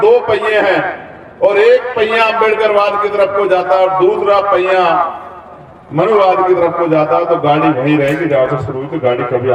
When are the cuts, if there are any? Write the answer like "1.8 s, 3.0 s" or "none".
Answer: none